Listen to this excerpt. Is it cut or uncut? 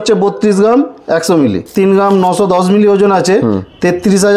cut